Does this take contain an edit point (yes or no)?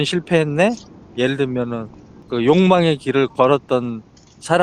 no